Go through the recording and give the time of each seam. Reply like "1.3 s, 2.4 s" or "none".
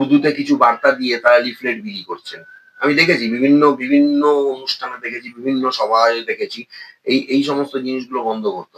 none